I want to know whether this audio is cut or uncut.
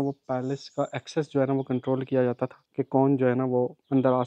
uncut